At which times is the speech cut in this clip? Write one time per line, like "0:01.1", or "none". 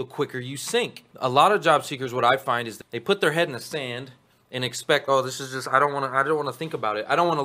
0:01.0
0:02.7